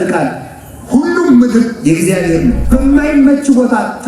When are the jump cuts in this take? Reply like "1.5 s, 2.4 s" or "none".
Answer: 2.6 s